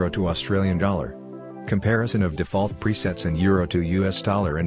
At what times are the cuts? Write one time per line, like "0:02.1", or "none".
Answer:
0:00.9

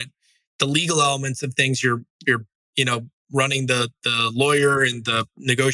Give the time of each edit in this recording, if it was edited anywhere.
none

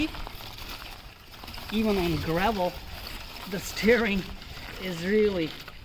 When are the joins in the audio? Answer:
none

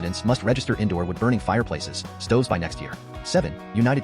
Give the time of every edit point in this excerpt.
0:03.1

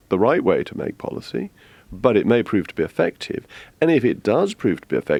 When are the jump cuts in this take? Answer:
none

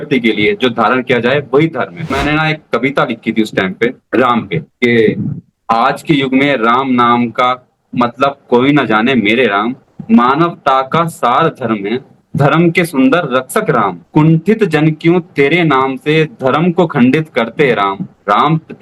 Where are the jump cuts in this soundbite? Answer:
0:02.1

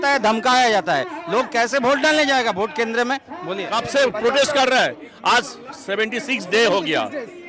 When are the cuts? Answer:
0:03.6

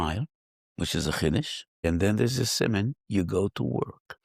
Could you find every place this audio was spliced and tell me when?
0:01.8

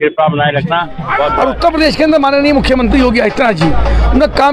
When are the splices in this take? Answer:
0:01.4

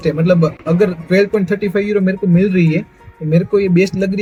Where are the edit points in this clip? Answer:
none

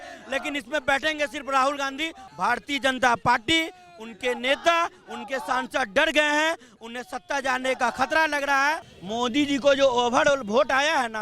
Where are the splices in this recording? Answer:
0:02.2
0:08.9

